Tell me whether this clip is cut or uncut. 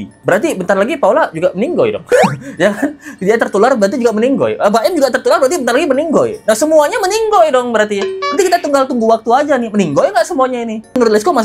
uncut